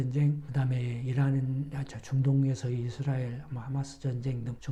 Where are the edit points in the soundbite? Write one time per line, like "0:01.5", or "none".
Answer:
none